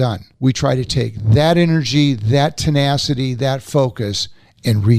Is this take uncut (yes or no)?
yes